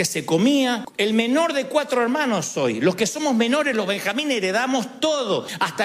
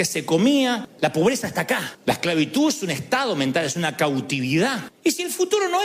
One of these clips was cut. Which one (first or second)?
second